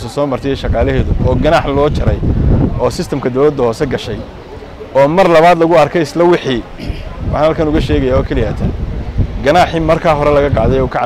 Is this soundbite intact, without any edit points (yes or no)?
yes